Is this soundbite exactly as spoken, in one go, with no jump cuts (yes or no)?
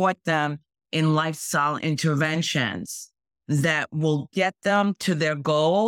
yes